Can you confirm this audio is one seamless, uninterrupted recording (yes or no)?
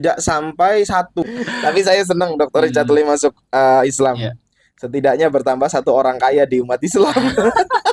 no